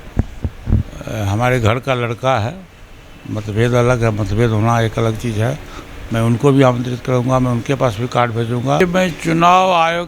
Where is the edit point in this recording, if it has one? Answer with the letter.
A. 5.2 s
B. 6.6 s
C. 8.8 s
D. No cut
C